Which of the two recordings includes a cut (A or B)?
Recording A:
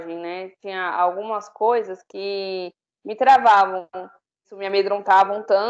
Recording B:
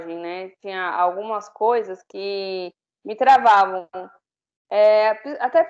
A